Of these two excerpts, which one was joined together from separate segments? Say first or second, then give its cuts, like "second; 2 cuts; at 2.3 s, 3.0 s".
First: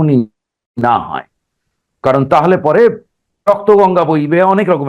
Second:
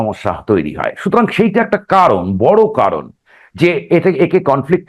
first; 1 cut; at 3.3 s